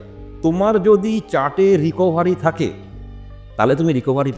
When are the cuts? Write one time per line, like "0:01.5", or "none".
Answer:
none